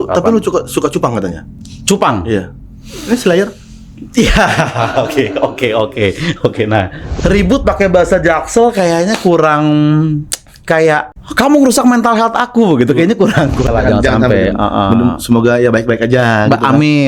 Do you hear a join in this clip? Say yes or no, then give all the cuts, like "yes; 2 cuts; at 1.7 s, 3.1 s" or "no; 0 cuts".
yes; 3 cuts; at 7.0 s, 11.2 s, 13.7 s